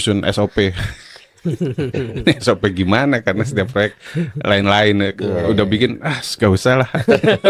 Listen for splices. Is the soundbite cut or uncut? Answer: uncut